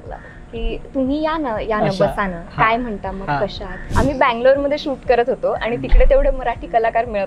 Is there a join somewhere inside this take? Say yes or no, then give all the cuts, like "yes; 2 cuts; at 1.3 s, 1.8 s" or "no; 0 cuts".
yes; 1 cut; at 3.8 s